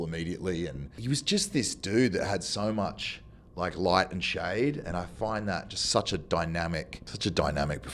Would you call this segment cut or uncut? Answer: cut